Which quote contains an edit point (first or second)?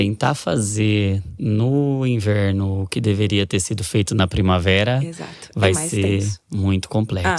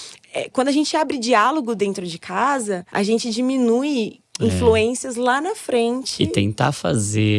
second